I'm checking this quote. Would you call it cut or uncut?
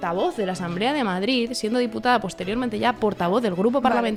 uncut